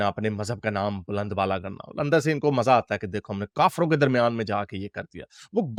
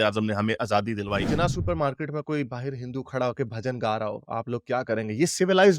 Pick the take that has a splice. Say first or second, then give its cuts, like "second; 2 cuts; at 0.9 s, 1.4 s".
second; 1 cut; at 1.2 s